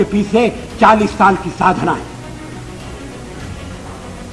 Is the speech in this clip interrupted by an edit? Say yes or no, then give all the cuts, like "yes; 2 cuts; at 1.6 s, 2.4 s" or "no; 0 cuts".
no; 0 cuts